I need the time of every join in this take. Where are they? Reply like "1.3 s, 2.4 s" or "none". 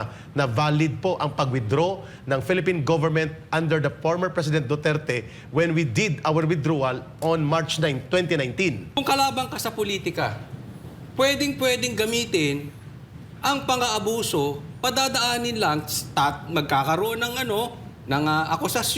9.0 s